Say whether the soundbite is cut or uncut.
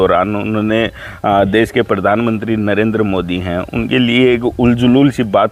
uncut